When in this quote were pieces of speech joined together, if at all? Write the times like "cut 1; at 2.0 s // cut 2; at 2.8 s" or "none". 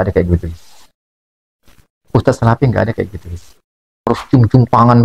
cut 1; at 4.1 s